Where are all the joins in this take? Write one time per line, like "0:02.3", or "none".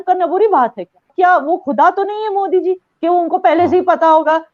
0:01.1